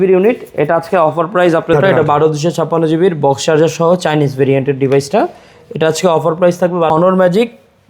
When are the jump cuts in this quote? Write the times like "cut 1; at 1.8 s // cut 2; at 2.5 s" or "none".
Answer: cut 1; at 1.7 s // cut 2; at 6.9 s